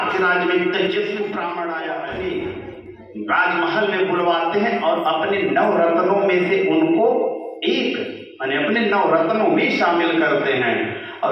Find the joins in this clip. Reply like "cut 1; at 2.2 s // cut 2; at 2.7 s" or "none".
cut 1; at 1.9 s